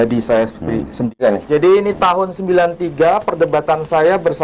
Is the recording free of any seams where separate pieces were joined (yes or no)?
no